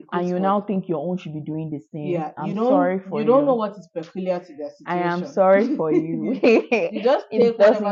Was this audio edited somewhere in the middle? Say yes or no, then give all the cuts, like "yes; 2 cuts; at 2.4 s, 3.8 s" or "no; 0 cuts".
no; 0 cuts